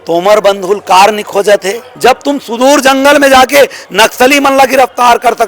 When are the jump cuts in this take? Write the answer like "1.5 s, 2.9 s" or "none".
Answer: 1.8 s